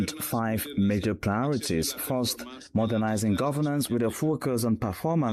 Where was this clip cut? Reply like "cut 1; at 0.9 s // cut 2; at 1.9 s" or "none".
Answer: none